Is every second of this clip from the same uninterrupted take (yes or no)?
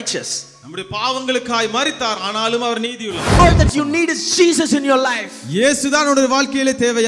no